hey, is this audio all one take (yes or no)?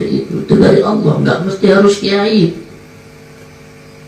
yes